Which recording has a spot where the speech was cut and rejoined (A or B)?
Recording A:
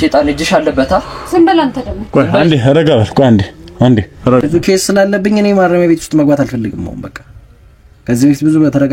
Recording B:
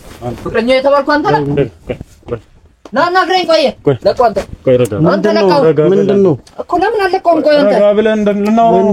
A